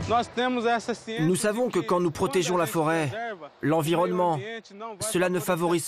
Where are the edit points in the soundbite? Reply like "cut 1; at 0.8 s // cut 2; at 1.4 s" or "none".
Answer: cut 1; at 1.1 s